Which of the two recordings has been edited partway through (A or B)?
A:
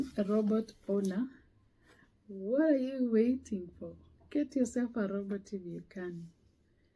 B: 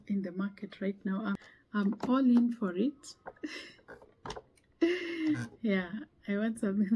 B